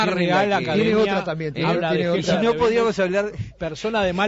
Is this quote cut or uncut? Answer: cut